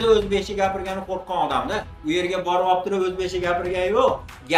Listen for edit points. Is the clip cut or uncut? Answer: uncut